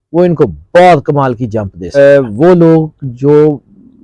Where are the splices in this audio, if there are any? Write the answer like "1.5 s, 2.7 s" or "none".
2.0 s